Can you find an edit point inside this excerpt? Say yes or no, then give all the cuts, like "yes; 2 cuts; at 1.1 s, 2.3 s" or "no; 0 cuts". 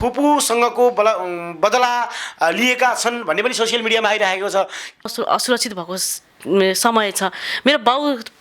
yes; 1 cut; at 5.1 s